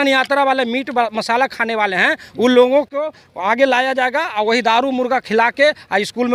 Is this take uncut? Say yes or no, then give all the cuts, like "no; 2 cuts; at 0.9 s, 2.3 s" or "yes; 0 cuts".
yes; 0 cuts